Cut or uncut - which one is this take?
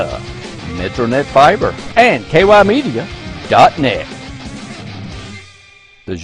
cut